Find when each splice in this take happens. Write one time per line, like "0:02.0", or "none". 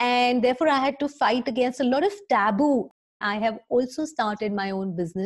0:02.9